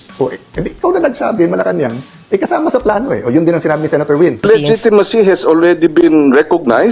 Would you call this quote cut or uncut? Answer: cut